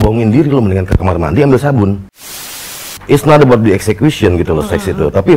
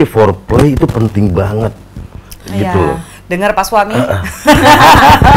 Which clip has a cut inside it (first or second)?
first